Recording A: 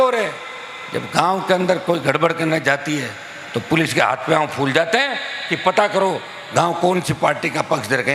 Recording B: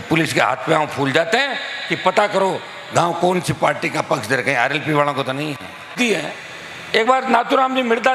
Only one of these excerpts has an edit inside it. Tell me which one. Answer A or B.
B